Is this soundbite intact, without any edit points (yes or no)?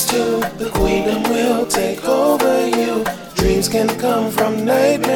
yes